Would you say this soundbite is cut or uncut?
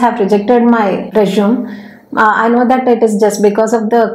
uncut